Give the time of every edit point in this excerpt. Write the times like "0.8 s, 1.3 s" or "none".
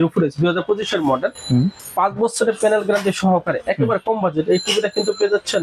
1.8 s